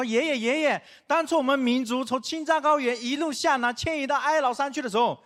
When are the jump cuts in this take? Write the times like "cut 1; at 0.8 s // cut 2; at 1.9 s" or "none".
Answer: none